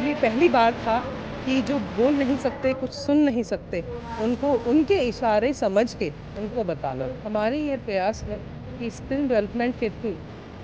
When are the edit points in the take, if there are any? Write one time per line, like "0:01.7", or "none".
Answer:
0:07.2